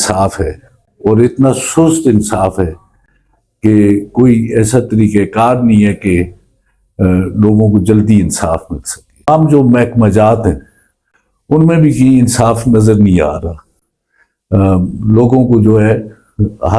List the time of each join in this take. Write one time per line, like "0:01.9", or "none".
0:09.3